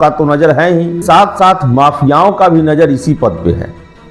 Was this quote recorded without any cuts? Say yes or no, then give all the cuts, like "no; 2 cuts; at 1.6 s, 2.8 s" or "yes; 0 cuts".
no; 1 cut; at 1.0 s